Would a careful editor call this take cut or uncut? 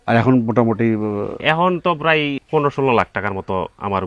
cut